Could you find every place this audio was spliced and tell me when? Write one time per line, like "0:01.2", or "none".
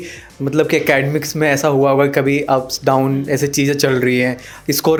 none

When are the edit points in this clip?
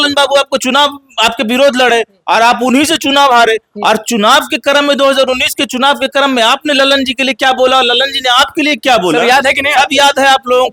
none

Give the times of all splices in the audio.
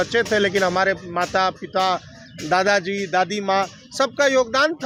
none

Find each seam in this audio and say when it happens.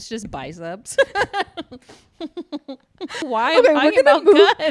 0:03.2

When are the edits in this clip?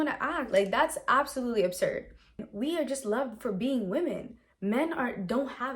0:02.5

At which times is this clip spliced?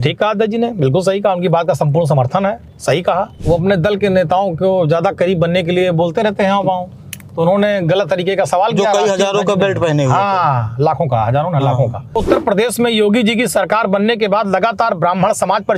0:03.4
0:12.1

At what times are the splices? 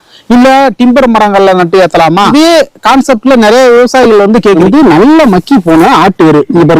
0:02.3
0:04.6

